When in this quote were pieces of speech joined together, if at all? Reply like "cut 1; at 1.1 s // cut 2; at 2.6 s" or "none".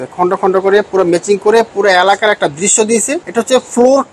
cut 1; at 3.2 s